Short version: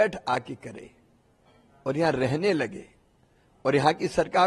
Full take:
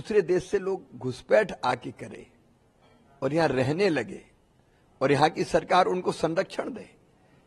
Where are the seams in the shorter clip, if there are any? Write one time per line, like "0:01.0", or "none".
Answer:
none